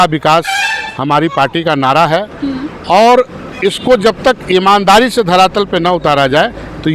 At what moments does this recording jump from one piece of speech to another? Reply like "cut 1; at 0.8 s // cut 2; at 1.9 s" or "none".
none